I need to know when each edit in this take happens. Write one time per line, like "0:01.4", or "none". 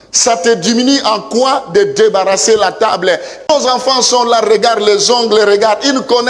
0:03.5